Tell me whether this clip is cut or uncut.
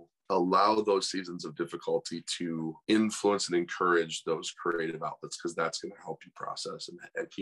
uncut